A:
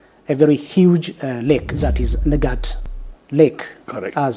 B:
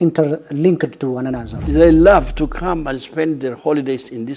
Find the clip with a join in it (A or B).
B